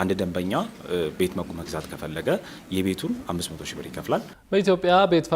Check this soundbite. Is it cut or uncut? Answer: cut